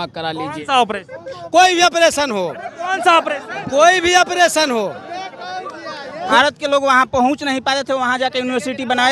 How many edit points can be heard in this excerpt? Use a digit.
1